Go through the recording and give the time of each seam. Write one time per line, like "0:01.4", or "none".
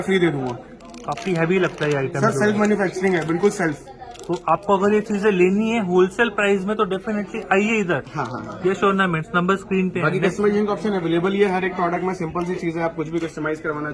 none

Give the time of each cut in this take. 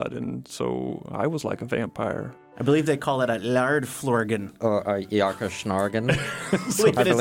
0:02.5

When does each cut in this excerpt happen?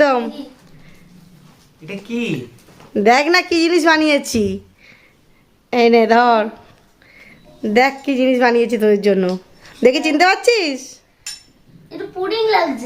0:09.4

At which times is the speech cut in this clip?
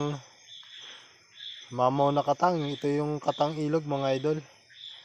none

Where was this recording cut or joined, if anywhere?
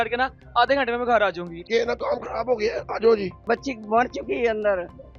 0:01.5
0:03.4

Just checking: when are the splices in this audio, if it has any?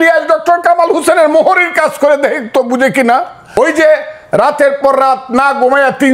0:03.6

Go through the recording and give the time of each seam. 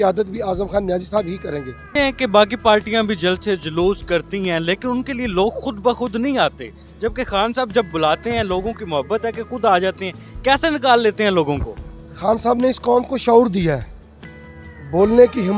none

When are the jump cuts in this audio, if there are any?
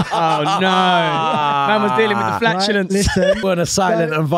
0:03.4

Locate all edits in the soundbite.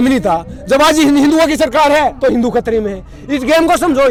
none

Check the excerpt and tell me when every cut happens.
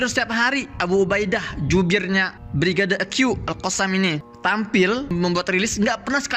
0:02.4
0:04.3
0:05.1

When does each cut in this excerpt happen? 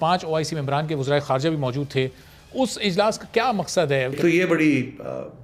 0:04.2

